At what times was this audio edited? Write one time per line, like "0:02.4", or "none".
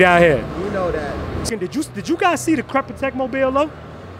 0:01.5